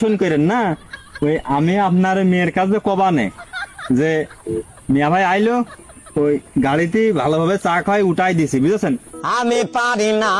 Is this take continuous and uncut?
yes; 0 cuts

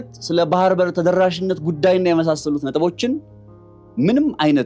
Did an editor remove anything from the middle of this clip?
no; 0 cuts

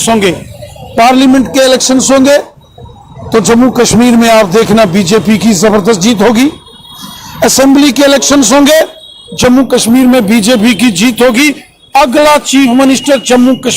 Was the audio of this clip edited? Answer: no; 0 cuts

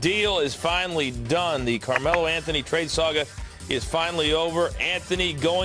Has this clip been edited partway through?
no; 0 cuts

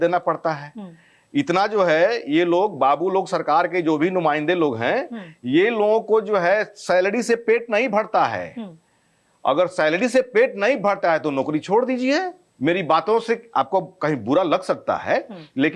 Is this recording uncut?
yes; 0 cuts

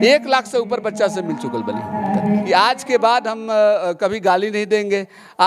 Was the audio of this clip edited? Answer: yes; 1 cut; at 2.4 s

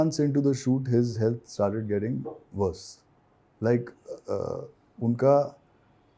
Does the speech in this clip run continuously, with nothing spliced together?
yes; 0 cuts

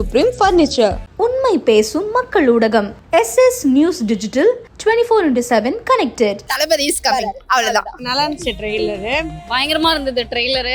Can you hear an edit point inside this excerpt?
yes; 1 cut; at 6.5 s

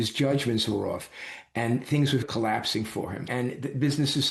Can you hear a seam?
yes; 1 cut; at 3.3 s

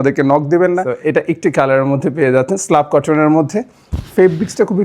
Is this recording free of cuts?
no; 1 cut; at 0.9 s

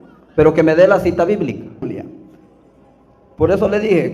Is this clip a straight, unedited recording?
no; 1 cut; at 1.8 s

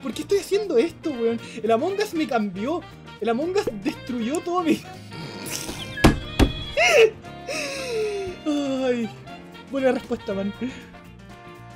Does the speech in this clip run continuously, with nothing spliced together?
yes; 0 cuts

